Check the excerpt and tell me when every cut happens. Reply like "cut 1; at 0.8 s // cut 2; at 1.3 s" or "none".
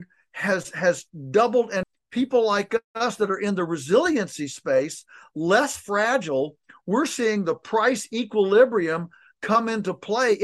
cut 1; at 1.9 s